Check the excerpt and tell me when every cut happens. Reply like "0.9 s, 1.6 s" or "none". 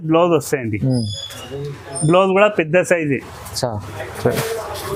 none